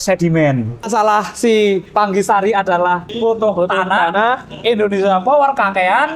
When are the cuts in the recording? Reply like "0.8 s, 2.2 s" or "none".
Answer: 0.8 s, 1.9 s, 3.1 s